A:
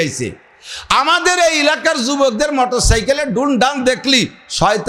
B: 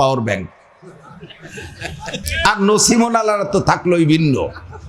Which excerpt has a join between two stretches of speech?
B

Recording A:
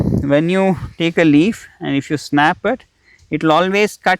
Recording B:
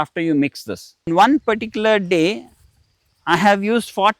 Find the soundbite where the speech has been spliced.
B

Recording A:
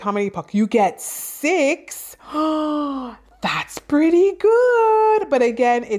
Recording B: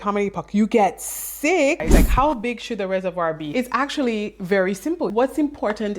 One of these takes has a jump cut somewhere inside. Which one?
B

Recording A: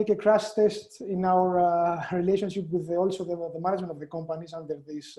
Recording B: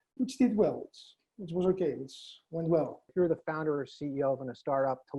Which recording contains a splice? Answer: B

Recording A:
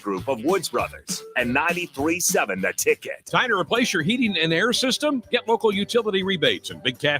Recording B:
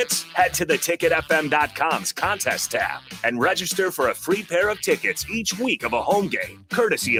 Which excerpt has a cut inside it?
A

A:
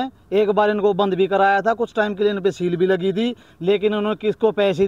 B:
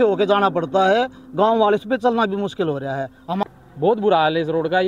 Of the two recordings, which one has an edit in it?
B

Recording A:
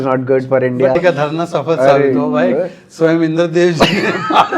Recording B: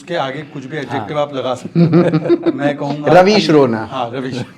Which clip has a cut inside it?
A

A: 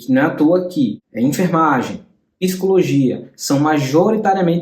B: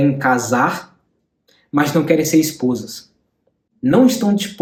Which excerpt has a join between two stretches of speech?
A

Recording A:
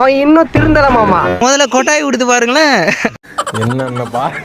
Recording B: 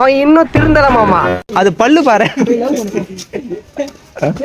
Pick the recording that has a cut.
A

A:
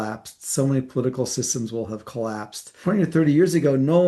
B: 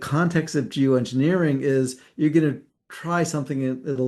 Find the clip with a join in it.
A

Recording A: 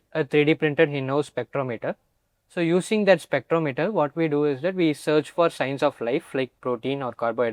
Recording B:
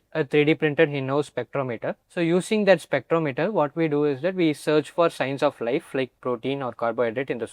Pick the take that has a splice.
B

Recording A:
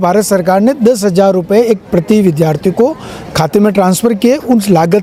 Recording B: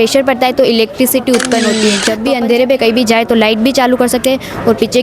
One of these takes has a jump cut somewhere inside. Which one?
B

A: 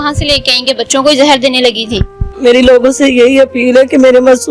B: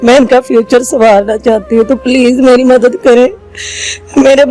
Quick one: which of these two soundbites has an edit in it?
A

